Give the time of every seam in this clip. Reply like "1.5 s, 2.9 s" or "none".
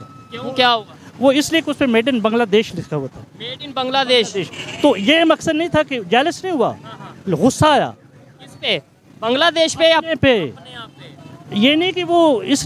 none